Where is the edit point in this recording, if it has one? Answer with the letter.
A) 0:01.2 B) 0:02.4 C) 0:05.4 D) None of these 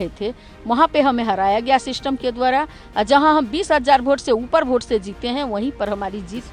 D